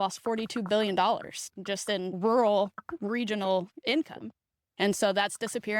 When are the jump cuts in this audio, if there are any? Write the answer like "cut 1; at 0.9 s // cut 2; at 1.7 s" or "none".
cut 1; at 2.2 s